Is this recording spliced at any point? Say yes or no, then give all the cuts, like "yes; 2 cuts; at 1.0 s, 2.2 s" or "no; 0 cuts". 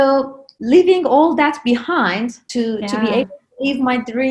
yes; 1 cut; at 2.4 s